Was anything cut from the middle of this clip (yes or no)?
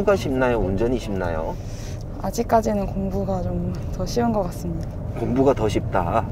no